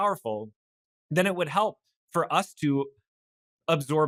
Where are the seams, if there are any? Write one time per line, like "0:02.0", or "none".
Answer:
none

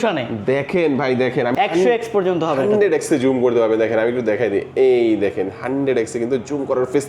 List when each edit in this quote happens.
0:01.5

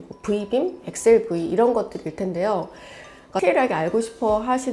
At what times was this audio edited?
0:03.3

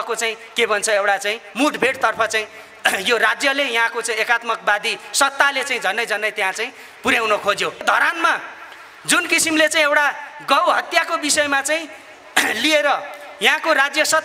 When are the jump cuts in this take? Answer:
0:07.8

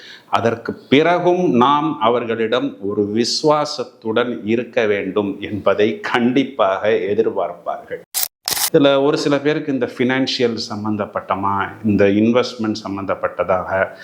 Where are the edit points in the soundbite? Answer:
0:08.1

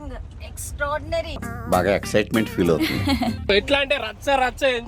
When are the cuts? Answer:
0:00.9
0:03.5

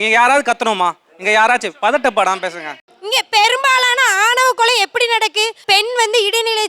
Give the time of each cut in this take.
0:02.9

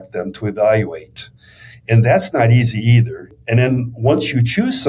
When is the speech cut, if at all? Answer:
0:03.4

